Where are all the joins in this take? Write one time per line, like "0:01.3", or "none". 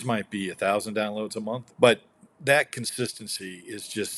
0:01.7